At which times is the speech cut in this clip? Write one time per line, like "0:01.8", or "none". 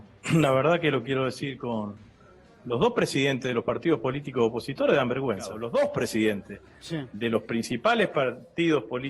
0:05.6